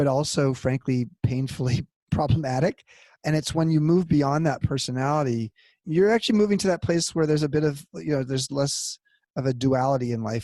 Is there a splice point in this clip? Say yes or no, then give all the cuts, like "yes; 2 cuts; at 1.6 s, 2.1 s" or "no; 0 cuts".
no; 0 cuts